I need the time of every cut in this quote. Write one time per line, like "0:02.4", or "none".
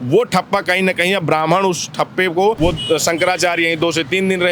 0:02.6